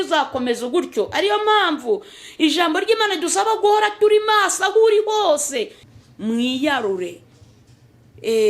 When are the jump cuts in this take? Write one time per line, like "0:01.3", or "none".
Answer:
0:05.8